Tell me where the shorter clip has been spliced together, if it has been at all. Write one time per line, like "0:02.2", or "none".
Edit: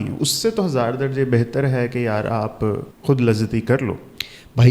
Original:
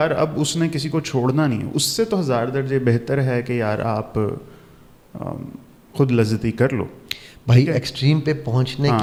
0:02.9